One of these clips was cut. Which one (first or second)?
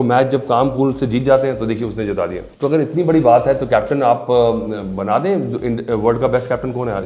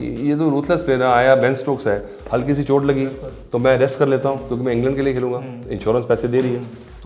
first